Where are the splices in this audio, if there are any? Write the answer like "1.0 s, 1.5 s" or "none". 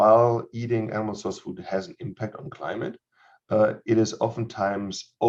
none